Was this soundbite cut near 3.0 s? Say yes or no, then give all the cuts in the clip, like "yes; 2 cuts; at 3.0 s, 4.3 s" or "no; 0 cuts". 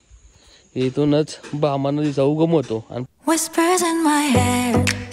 yes; 1 cut; at 3.0 s